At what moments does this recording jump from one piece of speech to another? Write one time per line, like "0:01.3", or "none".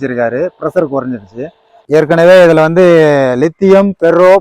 0:01.8